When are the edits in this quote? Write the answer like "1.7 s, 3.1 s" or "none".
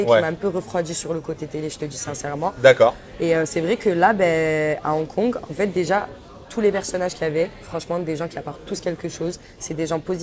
none